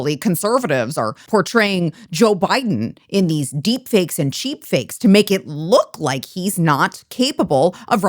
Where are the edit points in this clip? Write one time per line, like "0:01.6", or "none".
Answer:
0:01.2